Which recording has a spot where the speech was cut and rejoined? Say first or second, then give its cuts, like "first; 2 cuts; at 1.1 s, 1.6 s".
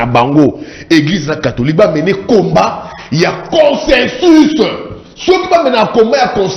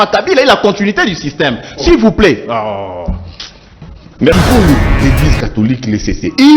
second; 1 cut; at 4.3 s